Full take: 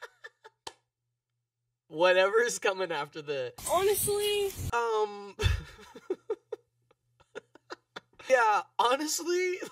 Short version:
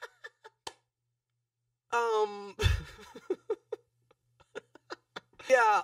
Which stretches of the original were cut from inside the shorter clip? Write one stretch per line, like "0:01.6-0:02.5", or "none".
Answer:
0:01.8-0:04.6